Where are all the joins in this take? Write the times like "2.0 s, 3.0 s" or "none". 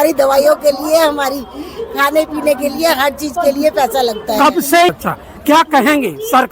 4.9 s